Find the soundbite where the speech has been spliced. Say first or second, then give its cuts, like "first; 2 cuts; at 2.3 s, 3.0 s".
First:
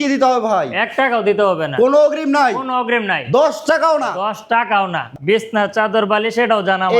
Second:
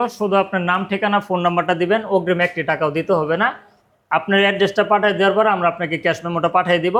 first; 1 cut; at 5.1 s